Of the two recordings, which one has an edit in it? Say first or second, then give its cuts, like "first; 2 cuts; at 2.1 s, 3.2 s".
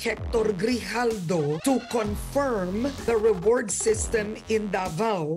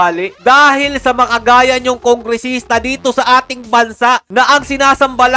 first; 2 cuts; at 1.6 s, 3.0 s